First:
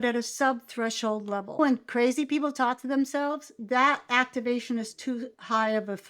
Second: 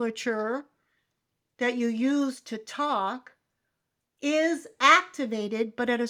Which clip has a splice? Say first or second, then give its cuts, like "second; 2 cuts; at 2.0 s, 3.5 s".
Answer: first; 2 cuts; at 1.6 s, 3.6 s